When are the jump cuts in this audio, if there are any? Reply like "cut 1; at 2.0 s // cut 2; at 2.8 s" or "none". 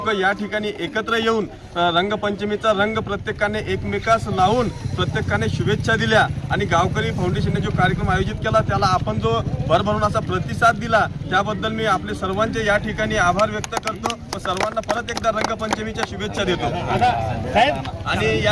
none